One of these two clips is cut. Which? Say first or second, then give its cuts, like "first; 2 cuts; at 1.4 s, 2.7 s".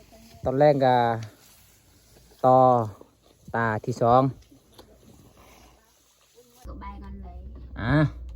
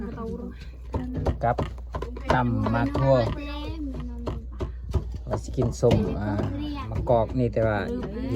first; 1 cut; at 6.7 s